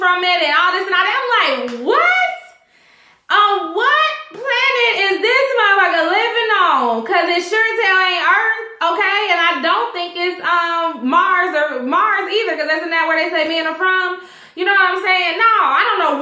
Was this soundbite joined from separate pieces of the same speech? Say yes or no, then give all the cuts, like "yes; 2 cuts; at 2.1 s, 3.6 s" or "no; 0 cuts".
yes; 1 cut; at 14.1 s